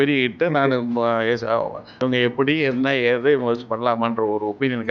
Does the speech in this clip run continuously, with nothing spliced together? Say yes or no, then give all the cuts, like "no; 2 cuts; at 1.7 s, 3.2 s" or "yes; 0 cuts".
no; 1 cut; at 1.9 s